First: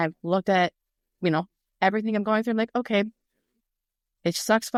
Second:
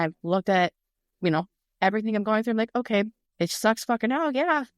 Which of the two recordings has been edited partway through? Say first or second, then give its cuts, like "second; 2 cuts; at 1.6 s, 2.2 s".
second; 1 cut; at 3.2 s